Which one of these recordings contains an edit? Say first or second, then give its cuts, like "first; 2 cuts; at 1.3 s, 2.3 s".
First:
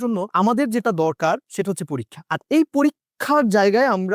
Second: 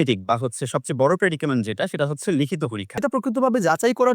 second; 1 cut; at 2.8 s